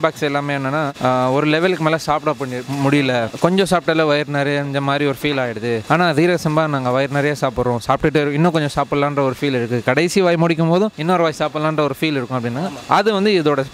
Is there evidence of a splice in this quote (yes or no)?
no